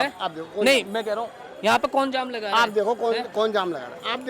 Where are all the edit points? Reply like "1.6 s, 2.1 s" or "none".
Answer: none